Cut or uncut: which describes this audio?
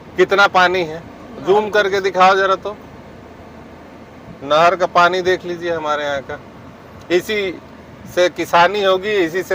uncut